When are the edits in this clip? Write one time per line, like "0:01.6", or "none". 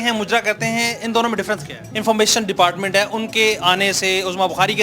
0:01.9